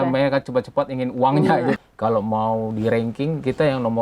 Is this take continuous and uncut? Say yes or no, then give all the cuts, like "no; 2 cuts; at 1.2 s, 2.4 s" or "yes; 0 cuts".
no; 1 cut; at 1.8 s